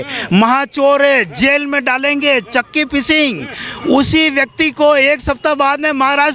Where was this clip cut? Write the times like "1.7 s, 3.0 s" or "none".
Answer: none